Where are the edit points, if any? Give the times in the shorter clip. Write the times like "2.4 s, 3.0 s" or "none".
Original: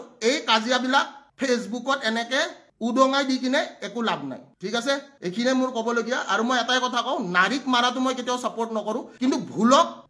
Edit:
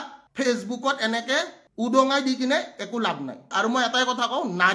3.5 s